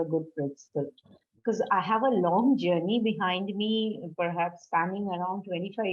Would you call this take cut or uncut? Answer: uncut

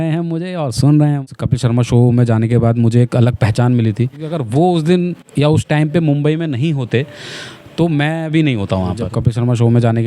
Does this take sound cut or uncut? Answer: cut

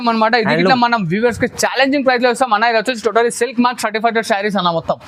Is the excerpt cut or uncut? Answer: uncut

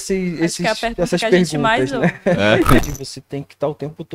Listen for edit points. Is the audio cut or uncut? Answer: cut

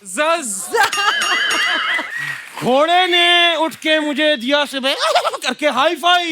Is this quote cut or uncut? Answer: cut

